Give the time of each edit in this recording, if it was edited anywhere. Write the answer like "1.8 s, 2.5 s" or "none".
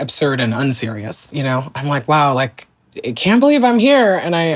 1.3 s